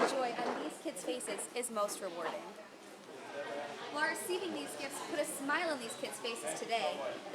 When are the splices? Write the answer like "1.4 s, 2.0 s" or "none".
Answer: 3.0 s